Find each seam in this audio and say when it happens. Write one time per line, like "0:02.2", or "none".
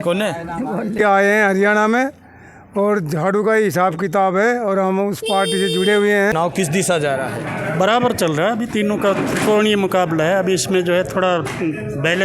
0:01.0
0:06.3